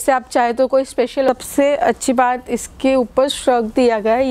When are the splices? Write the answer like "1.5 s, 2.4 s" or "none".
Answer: 1.3 s